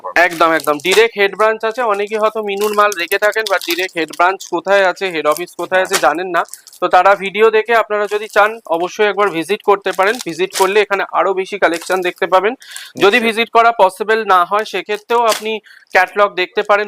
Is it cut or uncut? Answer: uncut